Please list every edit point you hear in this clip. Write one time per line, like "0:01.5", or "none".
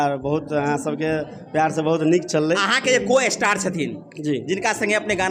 none